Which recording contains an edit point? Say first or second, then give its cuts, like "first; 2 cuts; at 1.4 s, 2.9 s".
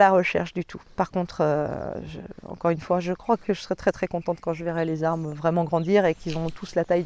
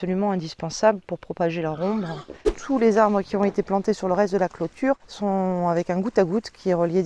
second; 2 cuts; at 2.6 s, 5.1 s